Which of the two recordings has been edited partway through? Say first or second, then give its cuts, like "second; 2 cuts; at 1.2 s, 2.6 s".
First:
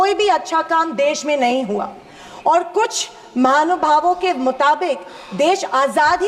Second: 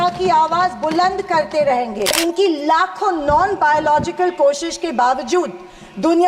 second; 1 cut; at 2.2 s